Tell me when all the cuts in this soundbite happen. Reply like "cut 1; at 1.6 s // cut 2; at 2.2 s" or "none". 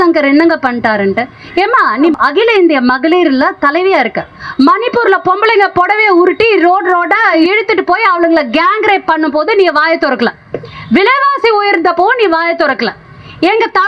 cut 1; at 2.1 s // cut 2; at 4.4 s // cut 3; at 7.4 s